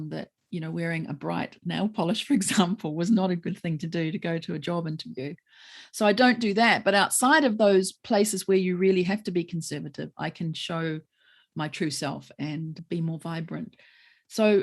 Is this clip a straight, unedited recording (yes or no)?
no